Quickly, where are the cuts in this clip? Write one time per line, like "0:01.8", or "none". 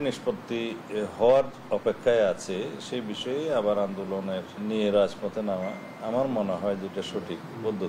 0:04.6